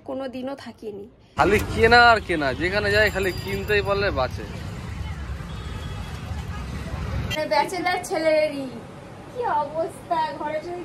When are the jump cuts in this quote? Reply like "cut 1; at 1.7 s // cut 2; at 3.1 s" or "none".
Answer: cut 1; at 1.3 s // cut 2; at 7.3 s